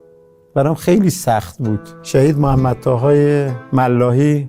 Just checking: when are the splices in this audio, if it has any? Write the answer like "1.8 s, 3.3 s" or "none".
1.9 s